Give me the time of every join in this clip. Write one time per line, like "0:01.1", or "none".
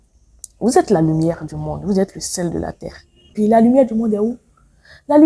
0:03.3